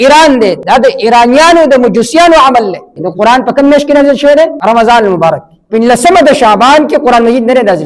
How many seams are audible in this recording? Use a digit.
3